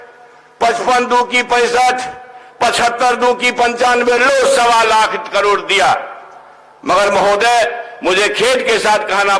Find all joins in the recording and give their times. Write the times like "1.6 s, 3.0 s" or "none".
none

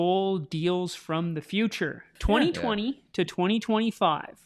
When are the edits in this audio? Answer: 2.2 s

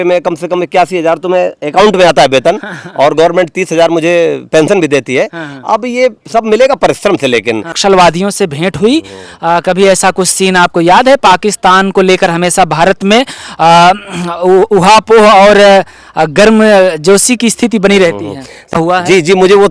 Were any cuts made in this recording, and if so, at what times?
7.7 s, 18.7 s

